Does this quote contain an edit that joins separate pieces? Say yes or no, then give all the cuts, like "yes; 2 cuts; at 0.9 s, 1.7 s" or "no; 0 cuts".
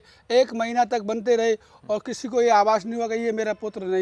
no; 0 cuts